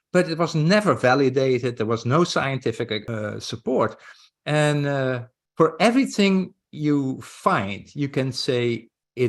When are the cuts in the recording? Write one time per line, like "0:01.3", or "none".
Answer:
0:03.0

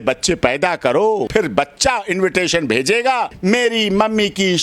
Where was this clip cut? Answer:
0:01.3
0:03.3

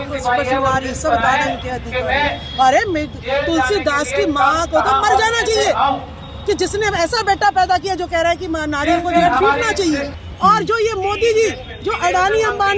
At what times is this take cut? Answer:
0:10.1

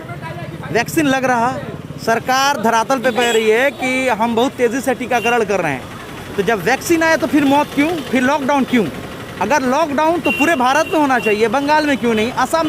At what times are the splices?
none

